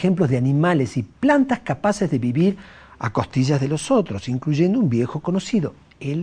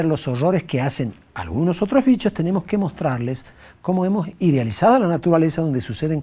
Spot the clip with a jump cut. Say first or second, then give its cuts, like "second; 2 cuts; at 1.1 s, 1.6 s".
first; 1 cut; at 1.6 s